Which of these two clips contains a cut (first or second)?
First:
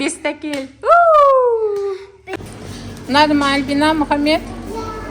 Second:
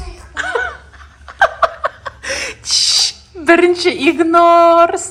first